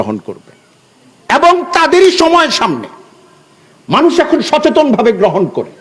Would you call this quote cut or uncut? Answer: uncut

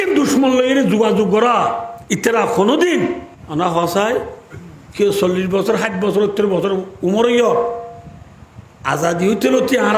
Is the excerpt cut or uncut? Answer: cut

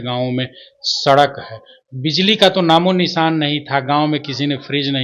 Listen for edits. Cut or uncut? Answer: uncut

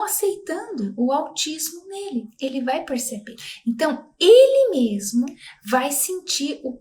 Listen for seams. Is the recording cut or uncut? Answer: uncut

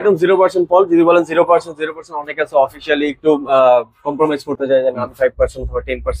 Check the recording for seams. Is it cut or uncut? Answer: uncut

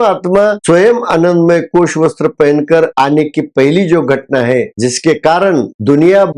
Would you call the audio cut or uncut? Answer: uncut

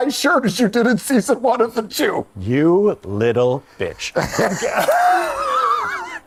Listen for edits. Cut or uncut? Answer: uncut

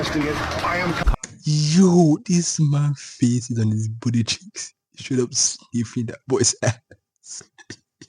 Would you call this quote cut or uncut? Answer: cut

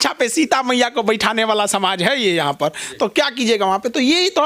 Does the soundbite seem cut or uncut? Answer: uncut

